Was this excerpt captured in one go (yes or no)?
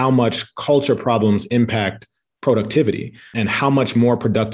no